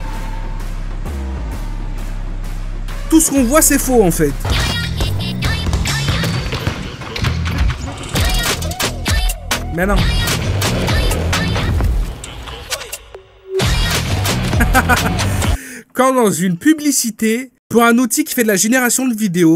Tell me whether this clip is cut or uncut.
cut